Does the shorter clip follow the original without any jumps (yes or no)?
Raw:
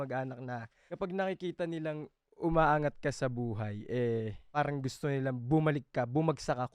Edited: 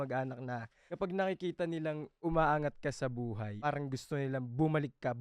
no